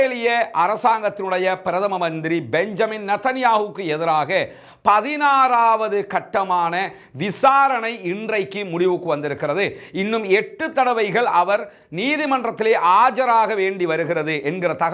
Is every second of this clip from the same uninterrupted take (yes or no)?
yes